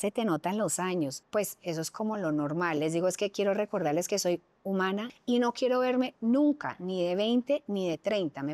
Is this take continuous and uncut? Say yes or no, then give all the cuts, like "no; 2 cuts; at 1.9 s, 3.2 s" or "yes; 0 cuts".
no; 2 cuts; at 1.2 s, 5.1 s